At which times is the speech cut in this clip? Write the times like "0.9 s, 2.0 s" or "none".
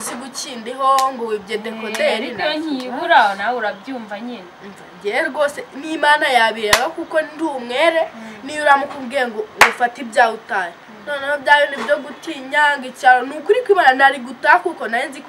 none